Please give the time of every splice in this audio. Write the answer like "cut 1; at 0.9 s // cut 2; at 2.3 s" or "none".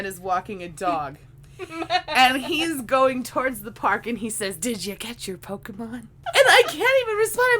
cut 1; at 6.1 s

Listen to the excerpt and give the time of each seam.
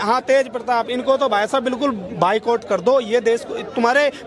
none

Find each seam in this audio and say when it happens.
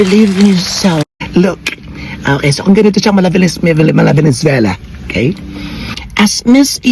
cut 1; at 1.2 s

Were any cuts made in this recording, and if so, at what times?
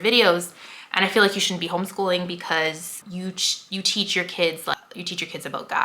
cut 1; at 3.0 s // cut 2; at 4.8 s

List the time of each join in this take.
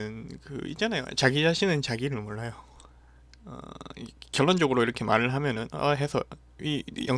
cut 1; at 1.4 s

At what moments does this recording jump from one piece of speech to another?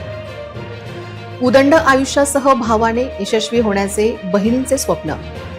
cut 1; at 1.3 s

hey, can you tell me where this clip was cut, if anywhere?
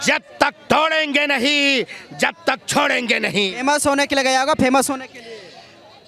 none

